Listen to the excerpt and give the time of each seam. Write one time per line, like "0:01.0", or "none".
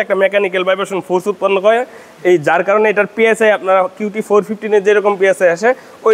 none